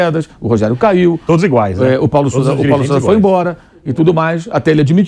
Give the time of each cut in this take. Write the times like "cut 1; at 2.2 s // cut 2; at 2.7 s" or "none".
none